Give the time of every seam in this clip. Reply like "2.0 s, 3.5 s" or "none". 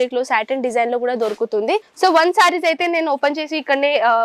1.9 s